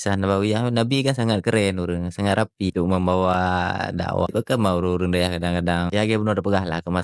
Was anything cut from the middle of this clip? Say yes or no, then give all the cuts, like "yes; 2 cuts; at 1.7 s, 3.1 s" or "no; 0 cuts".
yes; 3 cuts; at 2.7 s, 4.3 s, 5.9 s